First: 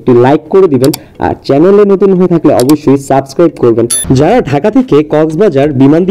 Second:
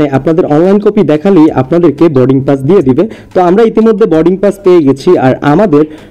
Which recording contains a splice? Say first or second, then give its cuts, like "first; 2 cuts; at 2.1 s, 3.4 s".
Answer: first; 1 cut; at 4.0 s